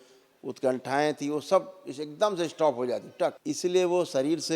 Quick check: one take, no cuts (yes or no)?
no